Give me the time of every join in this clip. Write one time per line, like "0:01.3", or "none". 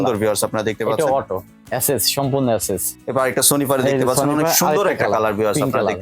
0:01.5
0:02.9